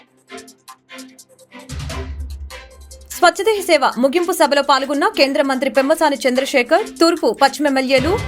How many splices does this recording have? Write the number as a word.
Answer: one